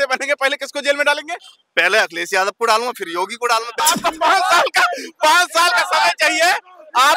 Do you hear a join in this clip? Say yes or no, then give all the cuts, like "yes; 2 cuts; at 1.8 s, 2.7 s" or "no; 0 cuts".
yes; 1 cut; at 3.8 s